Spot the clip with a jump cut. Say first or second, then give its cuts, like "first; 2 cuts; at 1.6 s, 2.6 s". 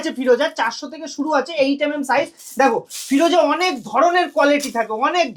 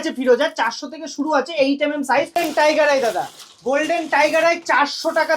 second; 1 cut; at 2.3 s